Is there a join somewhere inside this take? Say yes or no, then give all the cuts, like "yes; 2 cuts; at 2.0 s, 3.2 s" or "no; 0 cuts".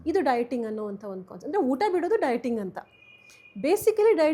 no; 0 cuts